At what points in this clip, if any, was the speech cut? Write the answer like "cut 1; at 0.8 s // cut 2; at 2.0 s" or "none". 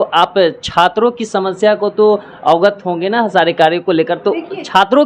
none